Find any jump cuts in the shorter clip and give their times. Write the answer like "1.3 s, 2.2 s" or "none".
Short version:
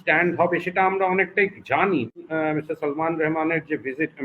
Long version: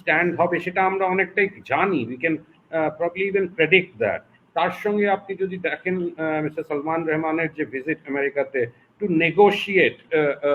2.2 s